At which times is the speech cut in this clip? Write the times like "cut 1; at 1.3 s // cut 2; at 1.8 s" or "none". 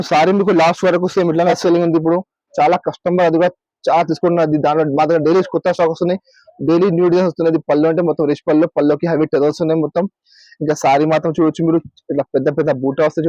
cut 1; at 1.6 s